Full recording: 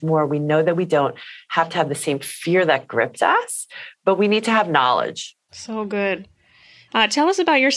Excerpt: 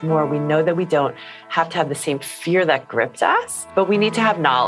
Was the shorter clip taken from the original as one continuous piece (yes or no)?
no